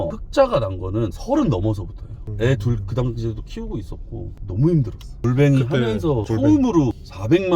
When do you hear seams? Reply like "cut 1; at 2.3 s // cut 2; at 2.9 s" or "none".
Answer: none

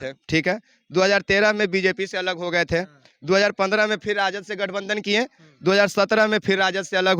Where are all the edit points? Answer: none

